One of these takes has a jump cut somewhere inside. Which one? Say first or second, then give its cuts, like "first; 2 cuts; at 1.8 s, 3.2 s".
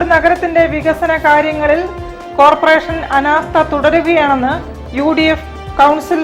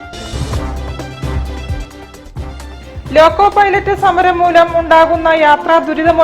second; 1 cut; at 2.8 s